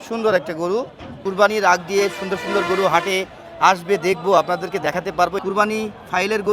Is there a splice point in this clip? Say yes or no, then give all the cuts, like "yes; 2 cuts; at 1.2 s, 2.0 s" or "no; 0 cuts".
yes; 2 cuts; at 1.2 s, 5.4 s